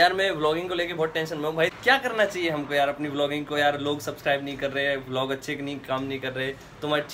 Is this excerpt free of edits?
no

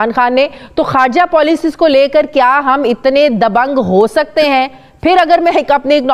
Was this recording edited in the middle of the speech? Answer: no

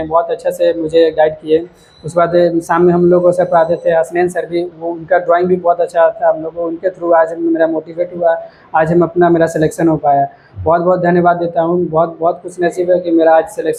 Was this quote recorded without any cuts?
yes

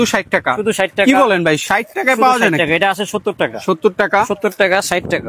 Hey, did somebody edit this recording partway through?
no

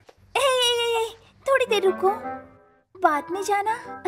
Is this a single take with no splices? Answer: yes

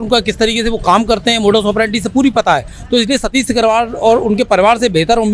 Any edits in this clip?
no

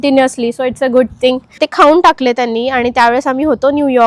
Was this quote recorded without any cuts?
no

